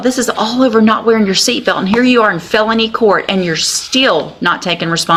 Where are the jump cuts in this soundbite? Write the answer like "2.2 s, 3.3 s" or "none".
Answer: none